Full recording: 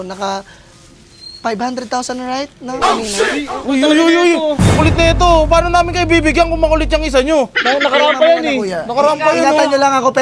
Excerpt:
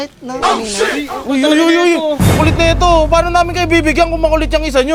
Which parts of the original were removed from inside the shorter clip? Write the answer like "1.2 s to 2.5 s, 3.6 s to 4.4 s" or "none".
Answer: none

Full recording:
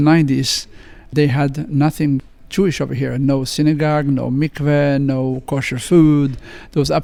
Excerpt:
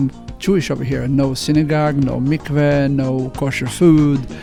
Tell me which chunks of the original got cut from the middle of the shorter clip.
none

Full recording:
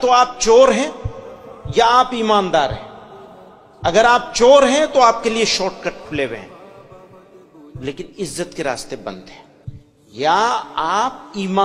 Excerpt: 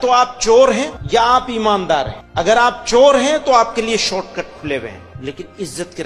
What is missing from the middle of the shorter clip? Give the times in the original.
1.0 s to 1.6 s, 2.8 s to 3.7 s, 6.5 s to 7.7 s

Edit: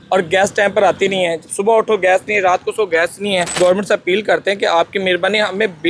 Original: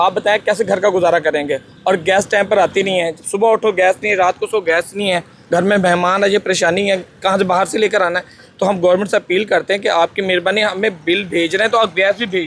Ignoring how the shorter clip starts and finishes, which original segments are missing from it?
5.3 s to 8.8 s

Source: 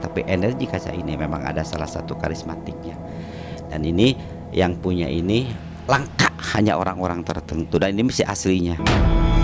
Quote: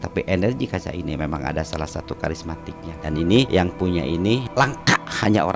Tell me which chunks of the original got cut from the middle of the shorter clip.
2.9 s to 3.6 s, 4.2 s to 4.5 s, 5.5 s to 5.8 s

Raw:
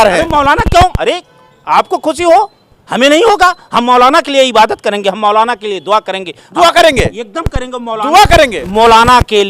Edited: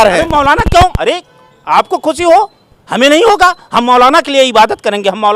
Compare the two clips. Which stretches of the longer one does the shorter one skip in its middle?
none

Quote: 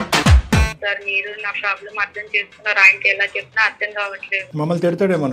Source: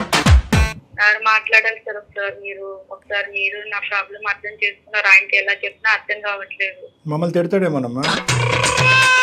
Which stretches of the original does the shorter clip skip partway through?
0.8 s to 3.0 s, 6.7 s to 6.9 s

